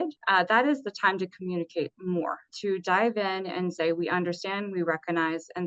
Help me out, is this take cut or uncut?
uncut